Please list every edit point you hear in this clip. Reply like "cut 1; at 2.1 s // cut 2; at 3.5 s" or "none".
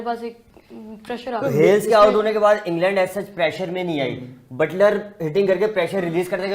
cut 1; at 1.4 s

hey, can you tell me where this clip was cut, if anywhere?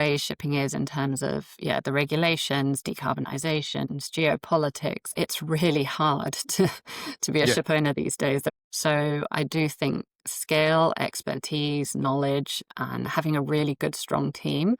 cut 1; at 5.1 s // cut 2; at 8.5 s // cut 3; at 13.8 s

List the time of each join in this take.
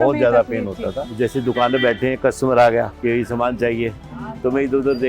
cut 1; at 1.0 s // cut 2; at 2.9 s

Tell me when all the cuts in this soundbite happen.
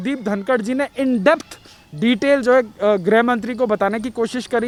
none

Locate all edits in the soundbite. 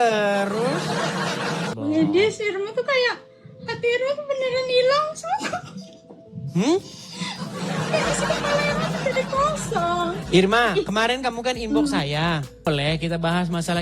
cut 1; at 1.7 s // cut 2; at 12.7 s

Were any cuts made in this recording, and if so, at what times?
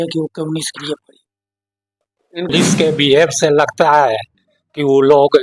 cut 1; at 2.5 s

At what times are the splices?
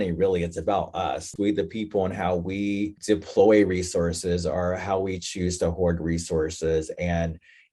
cut 1; at 1.3 s // cut 2; at 3.0 s

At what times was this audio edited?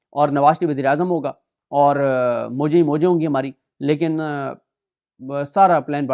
none

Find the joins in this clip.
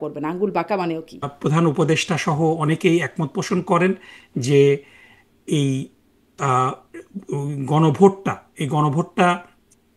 cut 1; at 1.3 s

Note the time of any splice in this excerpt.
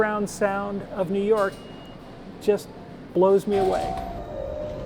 cut 1; at 3.8 s

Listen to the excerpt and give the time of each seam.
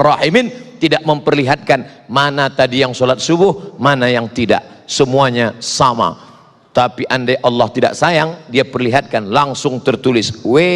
none

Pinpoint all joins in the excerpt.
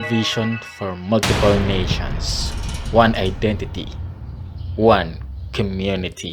none

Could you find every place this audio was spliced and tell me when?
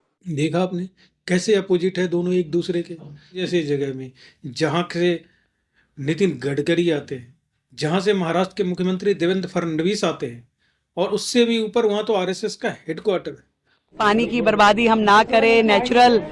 cut 1; at 3.4 s // cut 2; at 13.9 s

